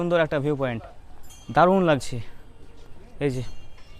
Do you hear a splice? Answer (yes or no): no